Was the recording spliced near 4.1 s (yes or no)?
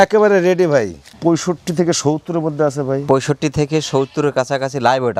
no